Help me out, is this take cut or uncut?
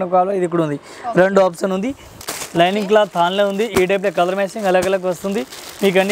cut